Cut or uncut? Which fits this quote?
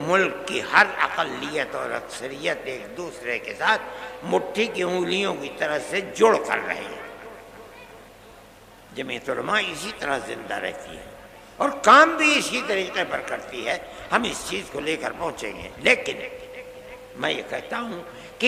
uncut